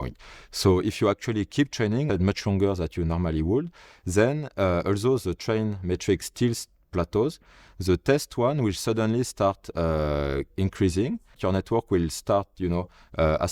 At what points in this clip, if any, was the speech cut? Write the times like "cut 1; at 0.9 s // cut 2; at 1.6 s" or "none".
cut 1; at 2.1 s // cut 2; at 11.4 s